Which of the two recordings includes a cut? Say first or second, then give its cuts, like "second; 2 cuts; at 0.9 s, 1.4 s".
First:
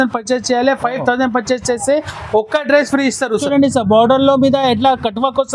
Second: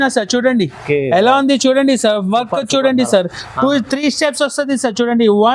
first; 1 cut; at 3.4 s